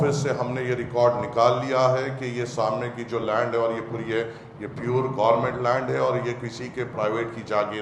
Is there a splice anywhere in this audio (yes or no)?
no